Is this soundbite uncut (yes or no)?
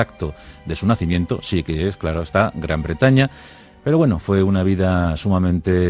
no